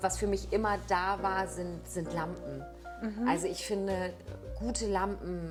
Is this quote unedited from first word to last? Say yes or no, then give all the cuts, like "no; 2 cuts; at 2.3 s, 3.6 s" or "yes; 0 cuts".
yes; 0 cuts